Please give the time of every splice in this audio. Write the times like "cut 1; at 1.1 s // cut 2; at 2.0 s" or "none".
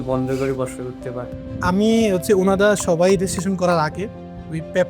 cut 1; at 1.4 s